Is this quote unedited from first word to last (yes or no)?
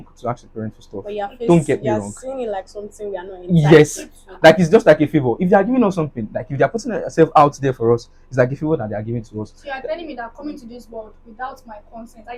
yes